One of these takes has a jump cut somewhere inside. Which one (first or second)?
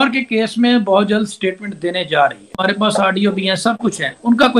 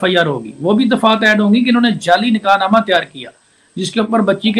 first